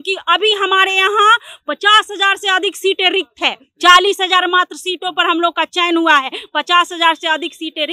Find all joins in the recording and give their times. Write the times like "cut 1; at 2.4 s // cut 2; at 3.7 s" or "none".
none